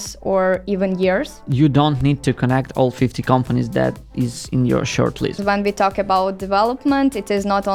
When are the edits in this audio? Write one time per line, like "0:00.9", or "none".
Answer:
0:01.5
0:05.4

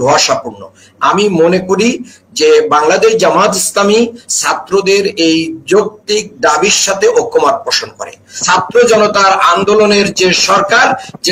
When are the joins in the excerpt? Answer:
0:08.3

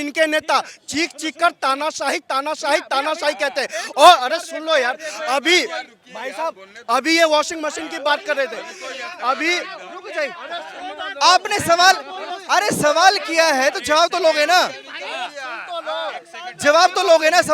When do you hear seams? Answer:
none

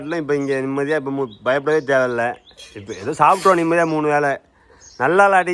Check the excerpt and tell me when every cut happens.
none

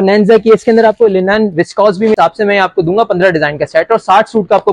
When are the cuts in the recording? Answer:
0:02.1

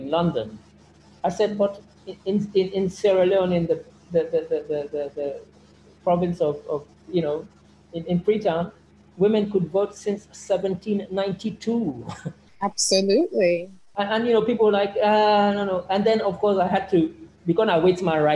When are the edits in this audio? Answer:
none

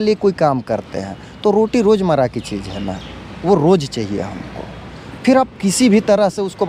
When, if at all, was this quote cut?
none

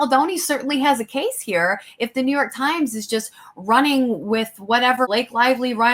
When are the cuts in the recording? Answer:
none

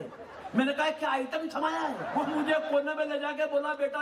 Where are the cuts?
0:02.0

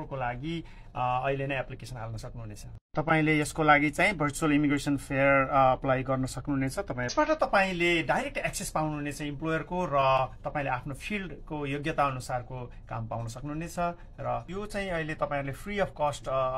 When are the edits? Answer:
0:07.1
0:14.0

